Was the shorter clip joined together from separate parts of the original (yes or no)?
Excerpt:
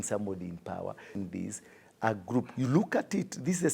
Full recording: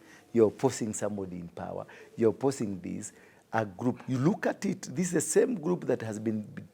yes